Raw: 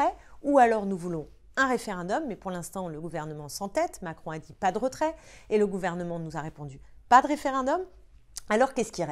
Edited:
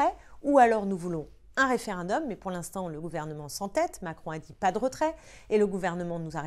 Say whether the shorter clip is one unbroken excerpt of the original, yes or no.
yes